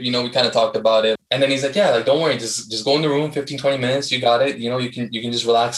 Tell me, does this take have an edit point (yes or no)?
yes